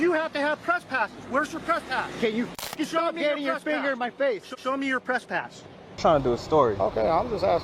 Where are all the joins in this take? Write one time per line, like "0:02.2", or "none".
0:05.9